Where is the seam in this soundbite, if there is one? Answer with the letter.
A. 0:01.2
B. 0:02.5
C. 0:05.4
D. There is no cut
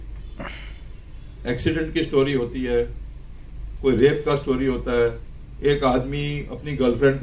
D